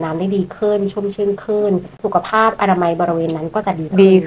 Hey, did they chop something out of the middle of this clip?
yes; 1 cut; at 2.0 s

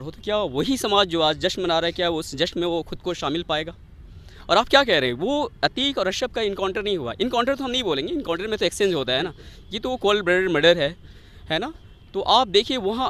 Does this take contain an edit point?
no; 0 cuts

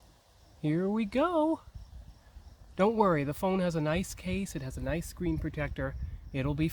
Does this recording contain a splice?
no; 0 cuts

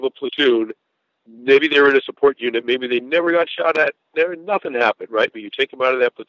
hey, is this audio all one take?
yes; 0 cuts

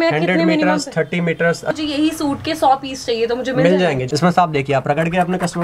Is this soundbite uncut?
no; 2 cuts; at 1.7 s, 4.0 s

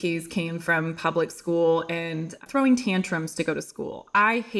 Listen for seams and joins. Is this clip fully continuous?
no; 1 cut; at 2.4 s

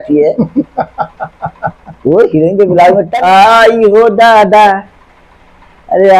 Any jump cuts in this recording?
yes; 1 cut; at 3.1 s

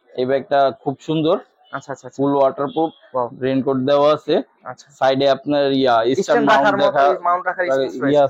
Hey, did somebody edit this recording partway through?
no; 0 cuts

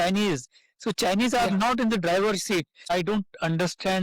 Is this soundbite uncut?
no; 1 cut; at 2.8 s

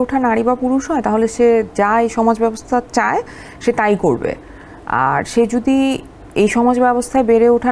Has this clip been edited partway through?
no; 0 cuts

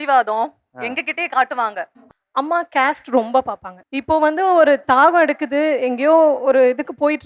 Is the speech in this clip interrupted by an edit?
yes; 1 cut; at 2.0 s

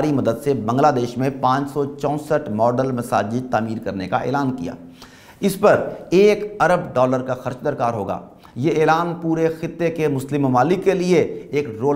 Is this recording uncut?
yes; 0 cuts

